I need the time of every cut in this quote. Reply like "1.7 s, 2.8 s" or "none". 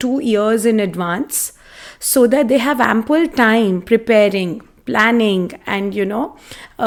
none